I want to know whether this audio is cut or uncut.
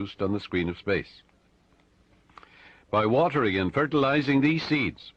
uncut